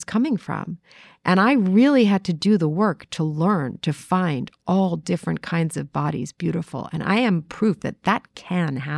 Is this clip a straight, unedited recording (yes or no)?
yes